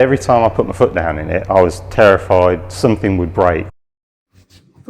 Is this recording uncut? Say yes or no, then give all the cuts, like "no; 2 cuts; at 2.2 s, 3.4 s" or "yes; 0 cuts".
no; 1 cut; at 3.7 s